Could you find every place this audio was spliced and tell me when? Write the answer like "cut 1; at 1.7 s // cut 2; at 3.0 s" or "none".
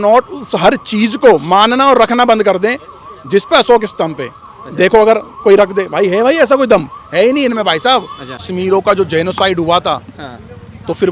cut 1; at 8.4 s